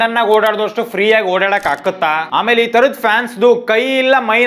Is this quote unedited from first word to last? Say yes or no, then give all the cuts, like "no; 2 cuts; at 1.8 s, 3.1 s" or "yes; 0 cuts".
no; 1 cut; at 2.2 s